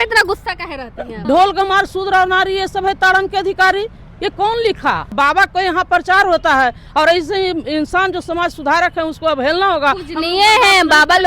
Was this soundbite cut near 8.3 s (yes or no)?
no